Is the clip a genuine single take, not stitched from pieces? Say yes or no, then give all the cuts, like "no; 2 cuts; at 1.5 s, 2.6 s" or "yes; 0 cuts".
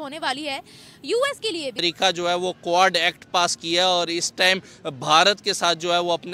no; 1 cut; at 1.8 s